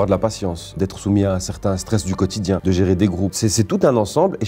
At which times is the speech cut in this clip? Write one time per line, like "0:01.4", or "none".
0:03.3